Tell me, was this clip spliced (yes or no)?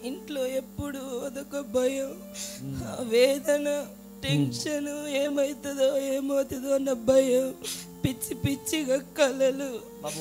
no